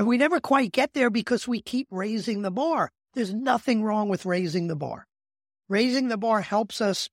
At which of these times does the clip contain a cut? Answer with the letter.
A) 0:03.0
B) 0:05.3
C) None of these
A